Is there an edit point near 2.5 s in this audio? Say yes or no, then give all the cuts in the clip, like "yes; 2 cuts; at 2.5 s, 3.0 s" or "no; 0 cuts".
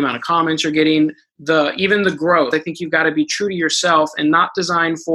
yes; 1 cut; at 2.5 s